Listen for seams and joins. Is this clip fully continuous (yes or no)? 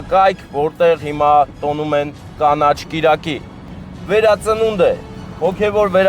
no